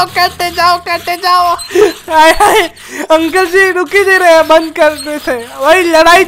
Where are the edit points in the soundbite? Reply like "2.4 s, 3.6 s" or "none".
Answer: none